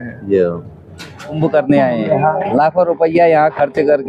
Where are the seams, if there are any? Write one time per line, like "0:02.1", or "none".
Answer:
0:01.4